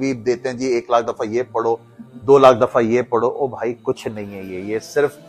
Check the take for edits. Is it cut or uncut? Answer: uncut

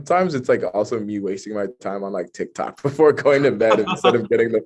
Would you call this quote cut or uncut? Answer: uncut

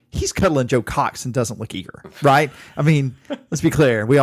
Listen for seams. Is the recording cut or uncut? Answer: uncut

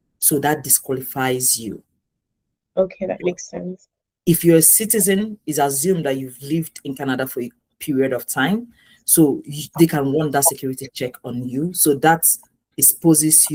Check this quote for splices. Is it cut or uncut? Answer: uncut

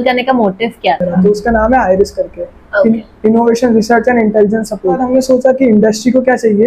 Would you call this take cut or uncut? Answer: cut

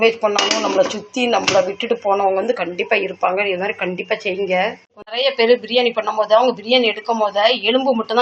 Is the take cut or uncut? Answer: cut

